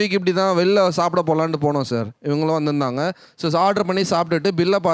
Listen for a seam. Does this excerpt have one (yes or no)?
yes